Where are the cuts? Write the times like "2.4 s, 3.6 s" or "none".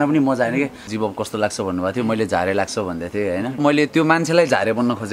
0.9 s, 3.6 s